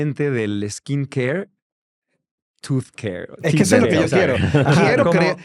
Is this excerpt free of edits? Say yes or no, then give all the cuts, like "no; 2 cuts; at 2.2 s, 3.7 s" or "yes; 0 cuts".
yes; 0 cuts